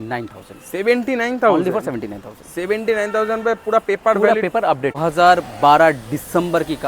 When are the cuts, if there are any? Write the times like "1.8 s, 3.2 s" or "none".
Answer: 5.0 s